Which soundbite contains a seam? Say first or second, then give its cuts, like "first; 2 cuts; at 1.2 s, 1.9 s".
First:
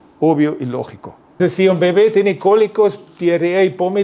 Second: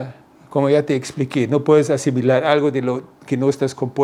first; 1 cut; at 1.4 s